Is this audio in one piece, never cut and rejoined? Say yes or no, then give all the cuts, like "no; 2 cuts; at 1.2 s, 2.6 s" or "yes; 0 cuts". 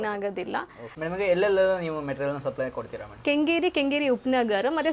yes; 0 cuts